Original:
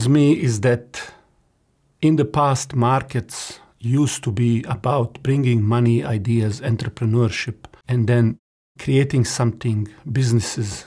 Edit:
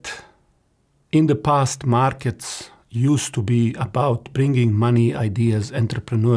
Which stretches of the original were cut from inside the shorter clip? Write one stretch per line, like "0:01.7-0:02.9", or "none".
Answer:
none